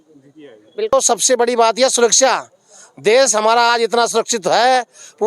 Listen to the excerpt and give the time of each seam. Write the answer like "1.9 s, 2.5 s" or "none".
0.9 s